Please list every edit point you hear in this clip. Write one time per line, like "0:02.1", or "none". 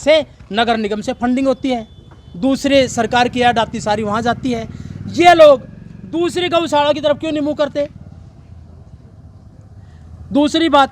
none